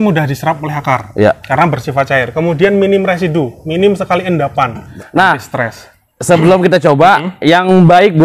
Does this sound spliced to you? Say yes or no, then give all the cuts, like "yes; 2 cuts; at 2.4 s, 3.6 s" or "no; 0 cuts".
yes; 1 cut; at 4.9 s